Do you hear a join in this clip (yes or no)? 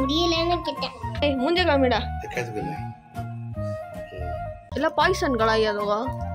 yes